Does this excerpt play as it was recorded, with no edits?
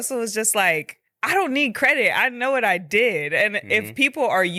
yes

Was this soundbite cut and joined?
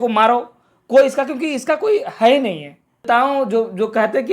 yes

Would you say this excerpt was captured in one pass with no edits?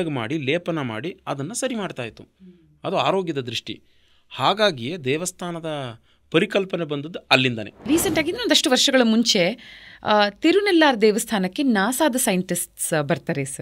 no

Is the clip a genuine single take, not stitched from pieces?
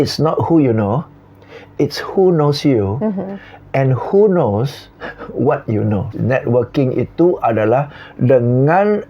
no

